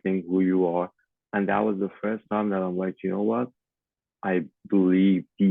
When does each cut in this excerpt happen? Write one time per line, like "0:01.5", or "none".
0:01.0

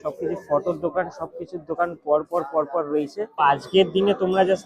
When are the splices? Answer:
0:03.4

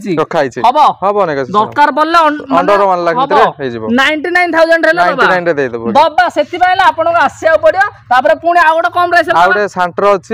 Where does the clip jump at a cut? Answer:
none

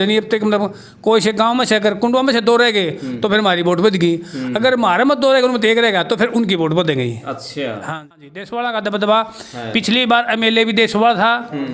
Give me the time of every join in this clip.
0:07.9

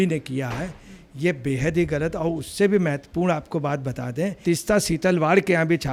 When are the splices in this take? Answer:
none

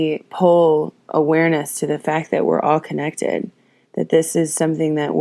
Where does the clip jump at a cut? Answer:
none

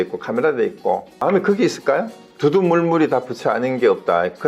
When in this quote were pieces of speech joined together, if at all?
0:01.2
0:02.2

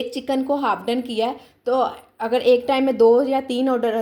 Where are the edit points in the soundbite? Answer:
none

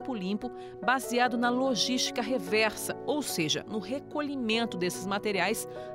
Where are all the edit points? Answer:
none

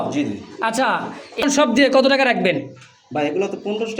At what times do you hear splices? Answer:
0:01.4

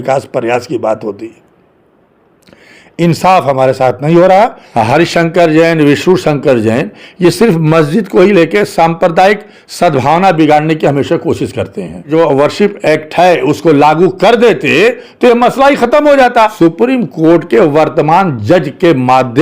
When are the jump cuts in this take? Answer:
0:04.6
0:12.1
0:16.5

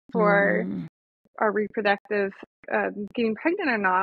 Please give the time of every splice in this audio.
0:02.6

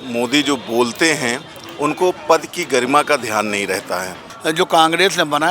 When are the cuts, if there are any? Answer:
0:04.3

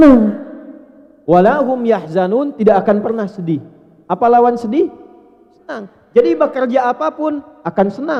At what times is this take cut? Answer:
none

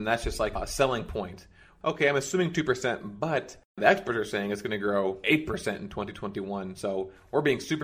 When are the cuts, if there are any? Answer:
0:01.6
0:03.6

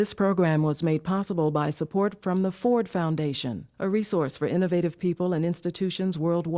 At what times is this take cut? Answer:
none

